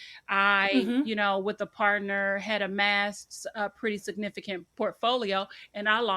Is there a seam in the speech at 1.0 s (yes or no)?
no